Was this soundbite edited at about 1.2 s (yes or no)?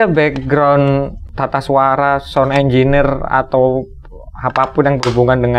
yes